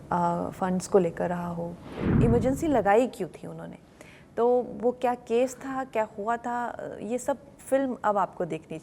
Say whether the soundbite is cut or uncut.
cut